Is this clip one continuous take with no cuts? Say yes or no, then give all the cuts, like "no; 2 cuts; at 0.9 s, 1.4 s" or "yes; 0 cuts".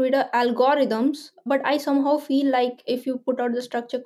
no; 2 cuts; at 1.4 s, 2.8 s